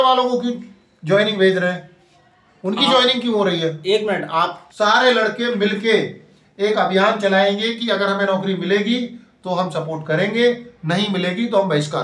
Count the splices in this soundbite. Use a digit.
1